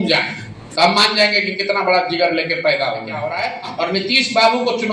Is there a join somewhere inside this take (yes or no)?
yes